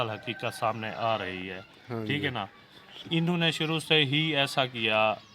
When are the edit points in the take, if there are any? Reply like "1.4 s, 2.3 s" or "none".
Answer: none